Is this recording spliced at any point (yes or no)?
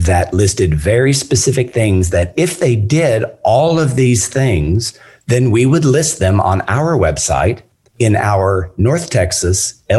no